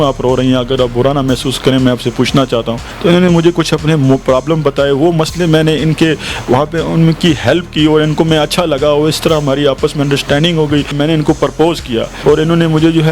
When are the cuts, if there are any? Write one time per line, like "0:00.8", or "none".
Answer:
0:02.8
0:10.9
0:12.1